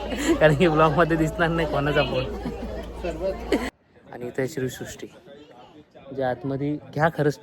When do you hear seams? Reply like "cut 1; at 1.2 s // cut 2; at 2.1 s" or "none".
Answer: cut 1; at 3.7 s